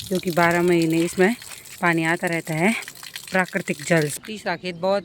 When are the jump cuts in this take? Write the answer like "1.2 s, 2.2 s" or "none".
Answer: 4.1 s